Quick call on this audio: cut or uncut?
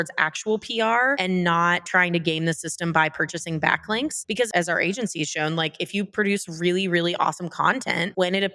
cut